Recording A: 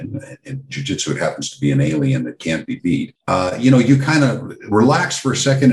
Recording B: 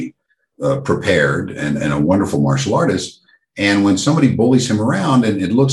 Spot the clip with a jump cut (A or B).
A